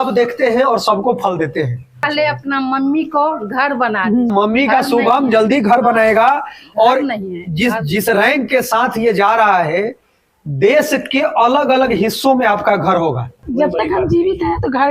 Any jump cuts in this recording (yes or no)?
yes